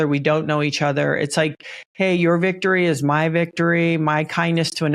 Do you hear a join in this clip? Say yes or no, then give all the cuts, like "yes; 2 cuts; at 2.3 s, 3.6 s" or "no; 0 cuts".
no; 0 cuts